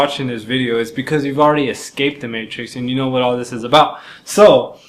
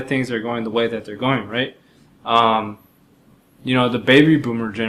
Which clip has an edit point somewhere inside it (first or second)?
first